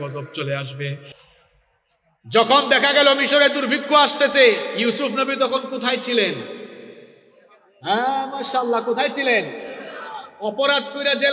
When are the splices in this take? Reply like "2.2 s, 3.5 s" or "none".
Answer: 1.1 s

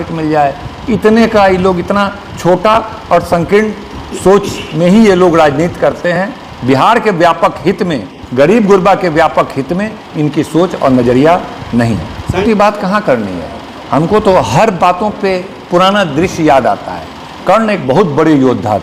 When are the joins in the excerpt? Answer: none

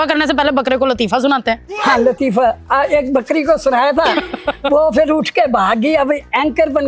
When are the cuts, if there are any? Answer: none

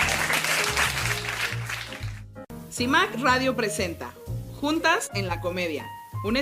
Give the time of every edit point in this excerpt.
2.5 s

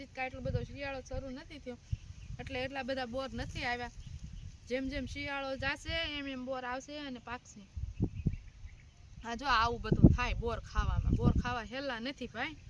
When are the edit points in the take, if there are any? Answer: none

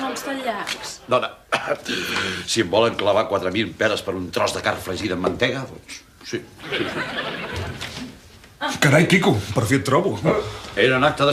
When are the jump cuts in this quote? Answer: 1.0 s

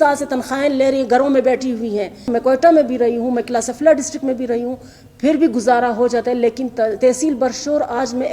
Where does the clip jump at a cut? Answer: 2.3 s

